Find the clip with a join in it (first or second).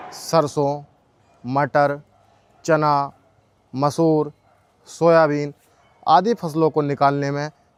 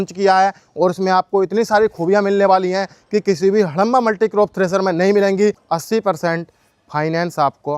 second